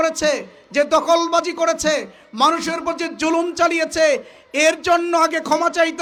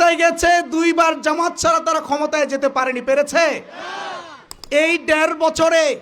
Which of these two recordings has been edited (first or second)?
second